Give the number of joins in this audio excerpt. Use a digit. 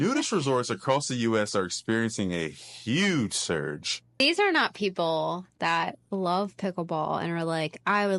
1